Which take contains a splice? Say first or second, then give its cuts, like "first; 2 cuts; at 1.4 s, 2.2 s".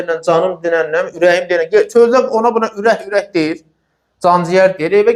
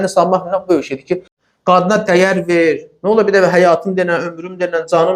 second; 1 cut; at 1.3 s